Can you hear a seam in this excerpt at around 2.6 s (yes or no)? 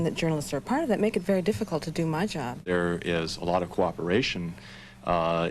yes